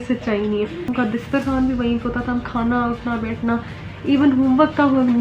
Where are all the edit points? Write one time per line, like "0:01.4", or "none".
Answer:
0:00.9